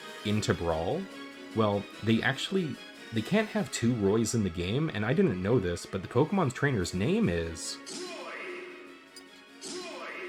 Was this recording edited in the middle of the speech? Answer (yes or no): no